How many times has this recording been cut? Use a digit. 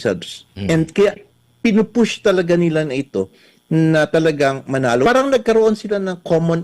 1